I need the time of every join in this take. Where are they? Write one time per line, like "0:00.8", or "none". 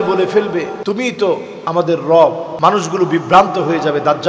0:00.8
0:01.5
0:02.5